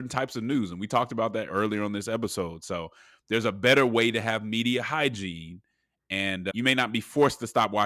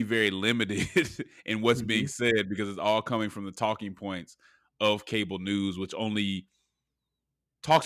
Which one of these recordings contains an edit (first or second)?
first